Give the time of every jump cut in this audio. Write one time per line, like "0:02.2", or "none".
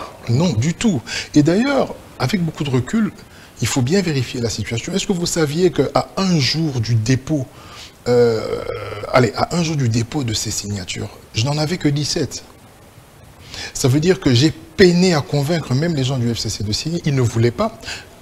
none